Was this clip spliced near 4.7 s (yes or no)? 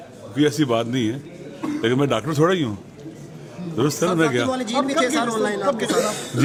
no